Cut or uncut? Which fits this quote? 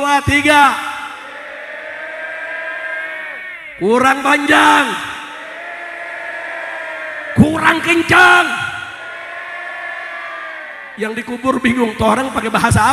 uncut